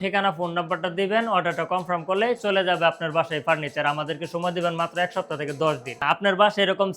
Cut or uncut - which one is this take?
cut